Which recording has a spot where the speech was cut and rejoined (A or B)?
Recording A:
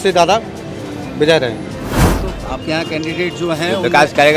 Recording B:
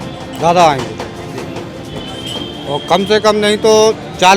A